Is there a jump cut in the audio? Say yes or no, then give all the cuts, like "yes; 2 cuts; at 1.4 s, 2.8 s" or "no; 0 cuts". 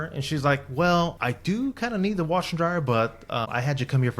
yes; 1 cut; at 1.1 s